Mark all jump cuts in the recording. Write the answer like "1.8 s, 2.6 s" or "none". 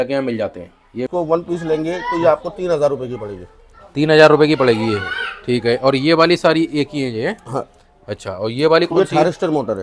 1.1 s